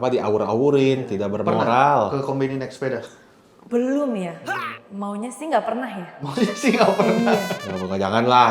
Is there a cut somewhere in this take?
no; 0 cuts

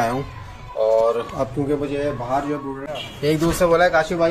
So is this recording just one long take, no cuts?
no; 1 cut; at 2.7 s

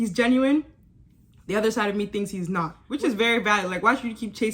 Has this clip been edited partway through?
yes; 1 cut; at 2.8 s

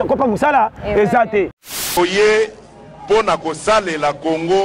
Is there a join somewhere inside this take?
yes; 1 cut; at 1.7 s

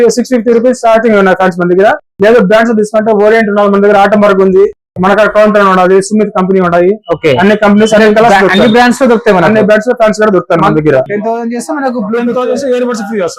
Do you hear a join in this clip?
yes; 1 cut; at 11.1 s

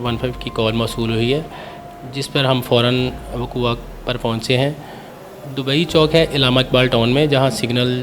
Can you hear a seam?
no; 0 cuts

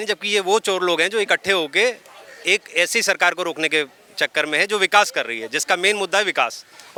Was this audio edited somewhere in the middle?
no; 0 cuts

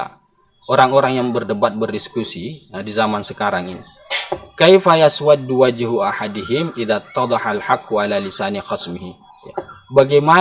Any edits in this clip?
no; 0 cuts

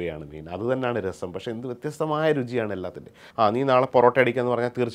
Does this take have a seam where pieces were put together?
yes; 1 cut; at 3.2 s

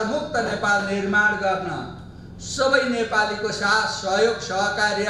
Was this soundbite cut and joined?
no; 0 cuts

